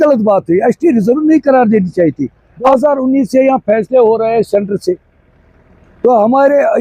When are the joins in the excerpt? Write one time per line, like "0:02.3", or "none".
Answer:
0:02.5

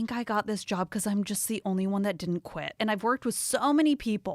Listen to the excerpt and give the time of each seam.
0:02.8

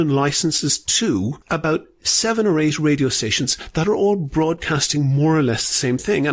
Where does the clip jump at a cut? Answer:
0:01.4

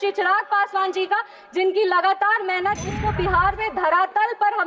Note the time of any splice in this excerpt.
0:03.0

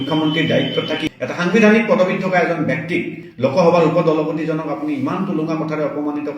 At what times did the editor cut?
0:01.0

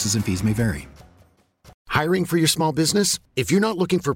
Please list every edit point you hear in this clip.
0:01.7

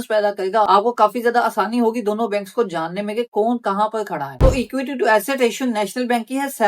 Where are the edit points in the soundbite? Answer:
0:04.3

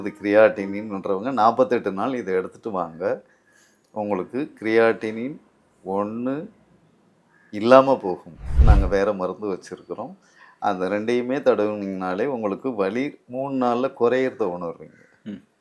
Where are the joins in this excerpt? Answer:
0:08.6

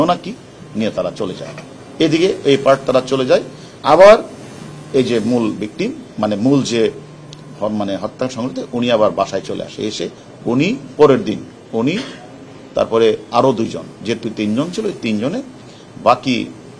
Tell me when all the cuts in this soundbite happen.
0:10.2

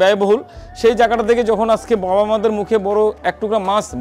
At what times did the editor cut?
none

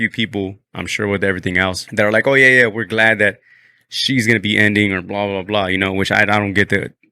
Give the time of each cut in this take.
0:01.8

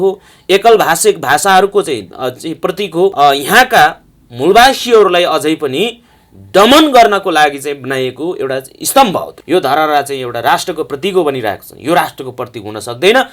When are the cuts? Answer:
0:03.1
0:09.3

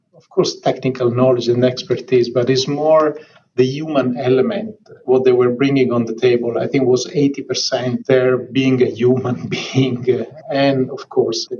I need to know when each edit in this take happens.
0:10.3

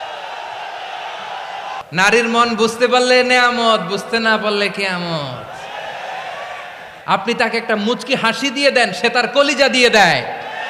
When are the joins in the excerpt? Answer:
0:01.8
0:06.9

